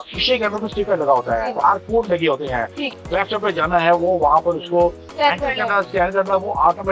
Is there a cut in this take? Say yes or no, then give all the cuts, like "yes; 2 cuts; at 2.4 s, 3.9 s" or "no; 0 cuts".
yes; 2 cuts; at 1.6 s, 2.9 s